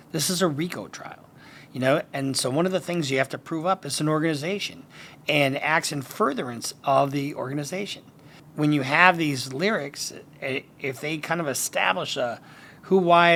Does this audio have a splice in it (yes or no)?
no